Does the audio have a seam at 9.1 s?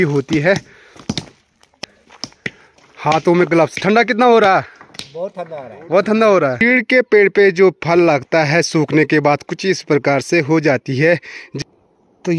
no; 3 cuts; at 1.8 s, 6.6 s, 11.4 s

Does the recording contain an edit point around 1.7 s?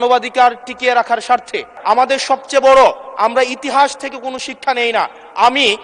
yes; 1 cut; at 1.7 s

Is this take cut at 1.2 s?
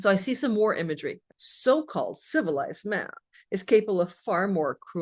yes; 1 cut; at 1.2 s

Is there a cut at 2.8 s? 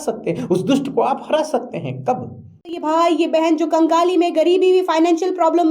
yes; 1 cut; at 2.8 s

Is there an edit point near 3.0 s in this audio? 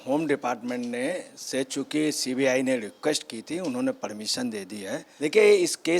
no; 1 cut; at 5.1 s

